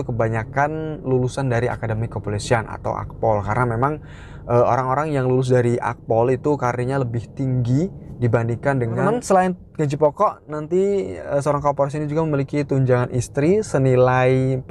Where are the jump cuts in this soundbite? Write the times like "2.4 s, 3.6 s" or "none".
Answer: 9.0 s